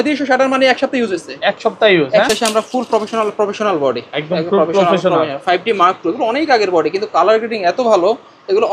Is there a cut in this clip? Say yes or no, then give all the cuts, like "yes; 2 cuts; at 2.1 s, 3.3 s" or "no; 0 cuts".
yes; 1 cut; at 2.3 s